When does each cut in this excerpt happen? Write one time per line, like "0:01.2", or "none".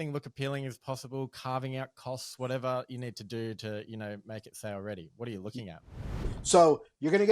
0:06.1